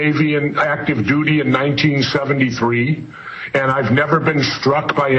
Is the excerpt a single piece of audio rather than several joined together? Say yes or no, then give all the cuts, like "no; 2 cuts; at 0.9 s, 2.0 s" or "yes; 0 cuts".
yes; 0 cuts